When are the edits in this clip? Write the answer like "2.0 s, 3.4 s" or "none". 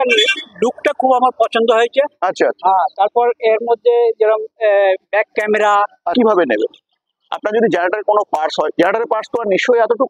6.1 s